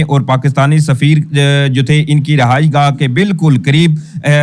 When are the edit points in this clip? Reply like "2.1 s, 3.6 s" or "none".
none